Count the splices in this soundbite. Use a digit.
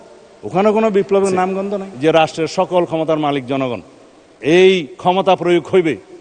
1